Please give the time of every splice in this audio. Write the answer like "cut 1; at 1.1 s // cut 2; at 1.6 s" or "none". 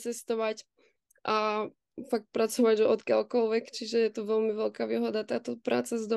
none